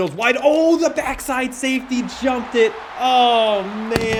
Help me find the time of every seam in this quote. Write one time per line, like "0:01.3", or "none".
none